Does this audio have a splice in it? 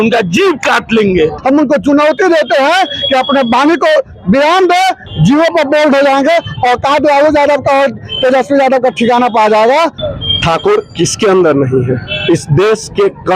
yes; 3 cuts; at 1.4 s, 5.0 s, 10.0 s

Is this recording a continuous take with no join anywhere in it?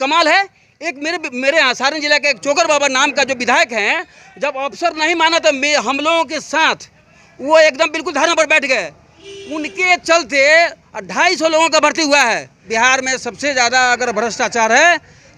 no; 1 cut; at 12.6 s

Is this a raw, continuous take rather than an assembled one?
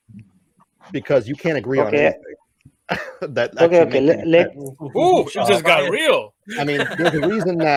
yes; 0 cuts

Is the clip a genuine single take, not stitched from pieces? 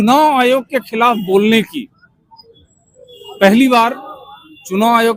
yes; 0 cuts

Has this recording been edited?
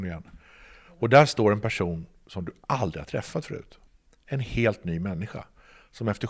yes; 1 cut; at 3.7 s

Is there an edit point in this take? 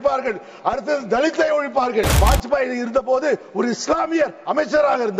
yes; 1 cut; at 2.2 s

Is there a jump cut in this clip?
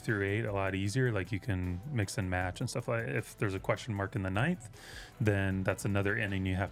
no; 0 cuts

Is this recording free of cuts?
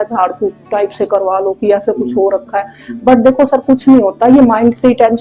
yes; 0 cuts

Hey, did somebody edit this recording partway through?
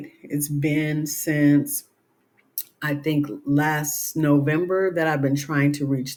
no; 0 cuts

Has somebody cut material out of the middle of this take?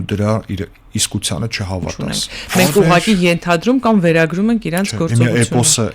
yes; 1 cut; at 2.0 s

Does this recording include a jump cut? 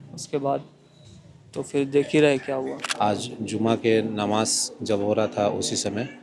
yes; 1 cut; at 2.7 s

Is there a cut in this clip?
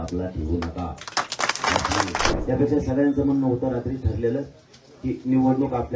yes; 1 cut; at 2.4 s

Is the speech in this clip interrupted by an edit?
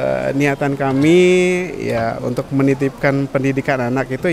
no; 0 cuts

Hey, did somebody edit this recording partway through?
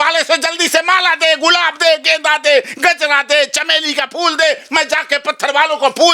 no; 0 cuts

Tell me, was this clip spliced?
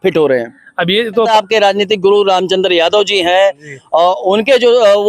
yes; 1 cut; at 1.3 s

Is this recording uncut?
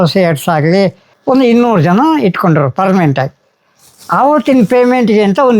no; 1 cut; at 1.2 s

